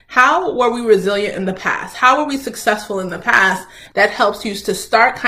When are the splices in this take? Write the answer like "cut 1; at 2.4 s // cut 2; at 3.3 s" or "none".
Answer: cut 1; at 3.8 s